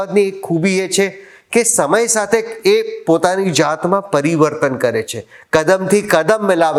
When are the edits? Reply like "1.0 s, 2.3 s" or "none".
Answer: none